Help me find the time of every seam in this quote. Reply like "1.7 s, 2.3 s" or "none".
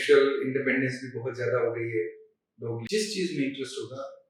2.8 s